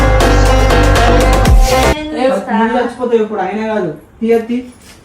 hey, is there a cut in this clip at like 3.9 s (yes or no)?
no